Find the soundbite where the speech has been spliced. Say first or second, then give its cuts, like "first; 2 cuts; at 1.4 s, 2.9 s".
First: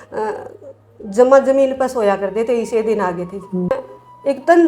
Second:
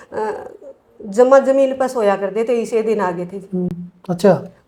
first; 1 cut; at 3.7 s